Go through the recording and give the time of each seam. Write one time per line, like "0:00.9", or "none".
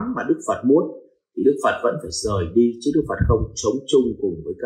none